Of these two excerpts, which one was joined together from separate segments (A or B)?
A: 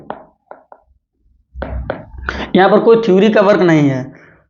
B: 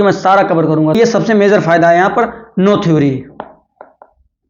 B